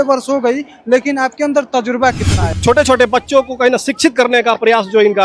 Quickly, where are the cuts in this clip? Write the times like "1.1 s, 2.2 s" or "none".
2.5 s